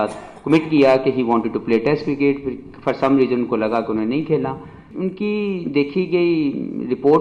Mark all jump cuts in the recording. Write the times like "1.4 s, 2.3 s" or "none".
4.9 s